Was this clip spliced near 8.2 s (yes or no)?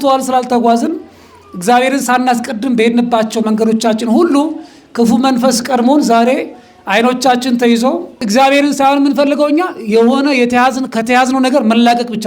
yes